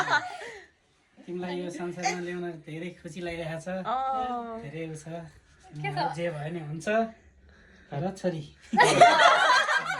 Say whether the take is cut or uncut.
uncut